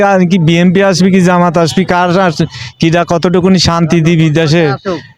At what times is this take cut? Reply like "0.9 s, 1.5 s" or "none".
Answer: none